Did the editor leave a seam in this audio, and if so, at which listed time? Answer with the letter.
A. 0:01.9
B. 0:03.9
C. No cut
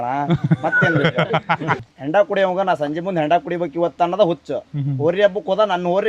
A